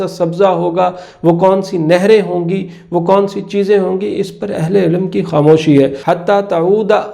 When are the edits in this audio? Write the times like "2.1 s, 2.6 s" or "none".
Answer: 6.0 s